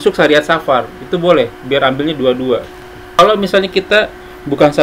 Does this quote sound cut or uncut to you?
cut